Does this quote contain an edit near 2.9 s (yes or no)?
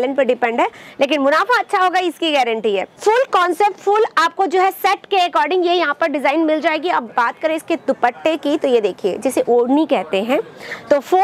yes